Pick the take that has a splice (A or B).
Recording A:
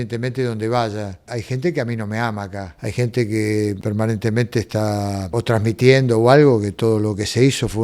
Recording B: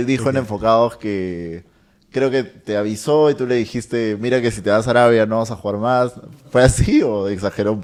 A